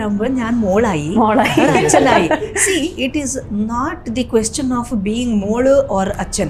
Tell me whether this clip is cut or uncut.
uncut